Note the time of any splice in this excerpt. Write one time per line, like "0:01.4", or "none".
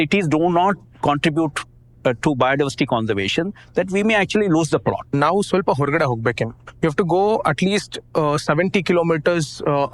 0:05.1
0:06.6